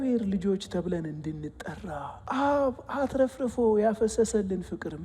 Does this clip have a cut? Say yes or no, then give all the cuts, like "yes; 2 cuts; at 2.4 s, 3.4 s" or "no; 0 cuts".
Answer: yes; 1 cut; at 2.1 s